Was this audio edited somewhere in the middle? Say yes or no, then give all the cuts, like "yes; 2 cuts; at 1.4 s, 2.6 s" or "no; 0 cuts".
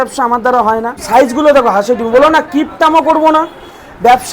yes; 1 cut; at 1.0 s